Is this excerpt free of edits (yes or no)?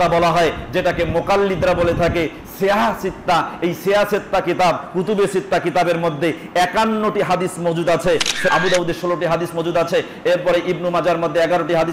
no